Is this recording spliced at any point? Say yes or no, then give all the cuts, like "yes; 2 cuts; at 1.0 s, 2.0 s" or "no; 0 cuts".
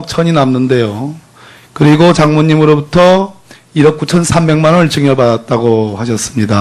no; 0 cuts